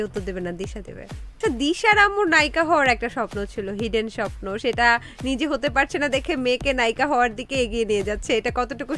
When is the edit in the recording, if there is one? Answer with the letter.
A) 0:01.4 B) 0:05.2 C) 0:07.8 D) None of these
A